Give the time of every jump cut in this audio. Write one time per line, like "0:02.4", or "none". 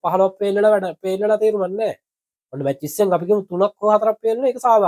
none